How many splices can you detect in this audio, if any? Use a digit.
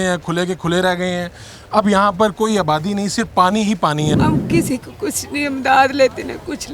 1